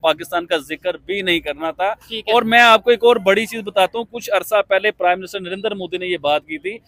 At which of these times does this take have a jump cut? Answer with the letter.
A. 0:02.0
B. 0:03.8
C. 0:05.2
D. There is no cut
D